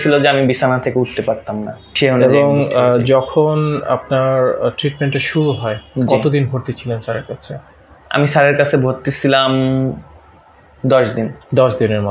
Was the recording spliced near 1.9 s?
yes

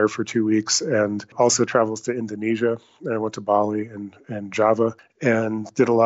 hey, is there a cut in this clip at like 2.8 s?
no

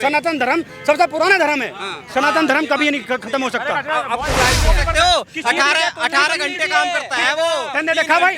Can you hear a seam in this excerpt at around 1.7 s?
no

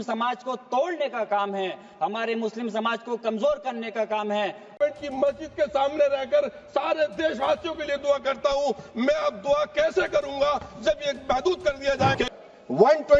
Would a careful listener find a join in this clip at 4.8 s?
yes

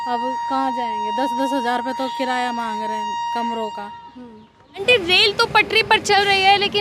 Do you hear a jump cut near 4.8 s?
yes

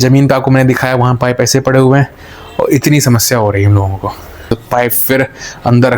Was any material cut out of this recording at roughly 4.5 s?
yes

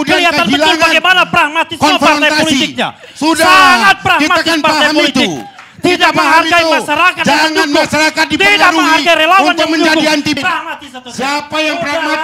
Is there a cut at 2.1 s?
no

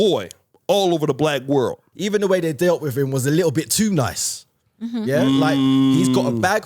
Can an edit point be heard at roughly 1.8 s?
yes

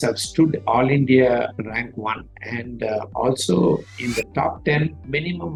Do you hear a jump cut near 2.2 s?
no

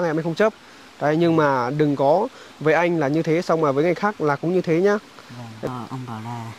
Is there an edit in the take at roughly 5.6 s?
yes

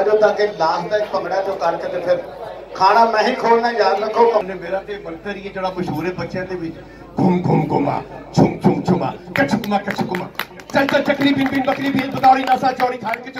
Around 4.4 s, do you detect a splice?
yes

